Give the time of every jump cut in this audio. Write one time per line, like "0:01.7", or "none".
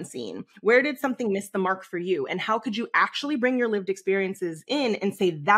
none